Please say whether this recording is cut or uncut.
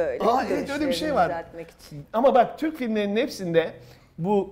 uncut